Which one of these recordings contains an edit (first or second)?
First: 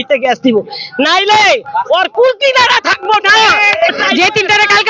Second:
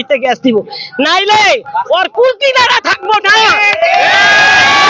first